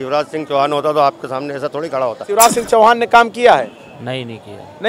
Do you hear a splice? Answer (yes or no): yes